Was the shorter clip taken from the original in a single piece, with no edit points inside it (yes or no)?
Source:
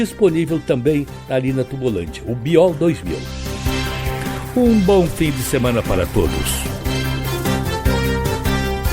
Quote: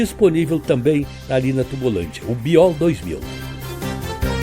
no